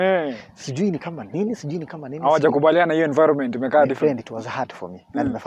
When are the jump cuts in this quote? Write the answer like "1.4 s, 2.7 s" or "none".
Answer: none